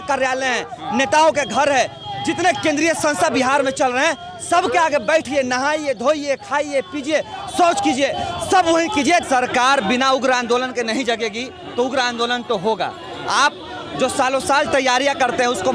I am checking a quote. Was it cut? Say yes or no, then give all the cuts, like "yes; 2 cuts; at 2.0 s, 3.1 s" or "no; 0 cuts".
yes; 1 cut; at 9.2 s